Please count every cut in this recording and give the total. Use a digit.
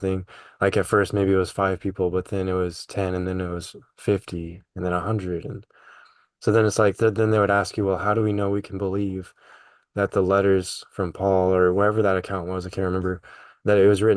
0